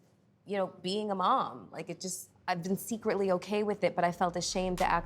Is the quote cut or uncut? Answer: cut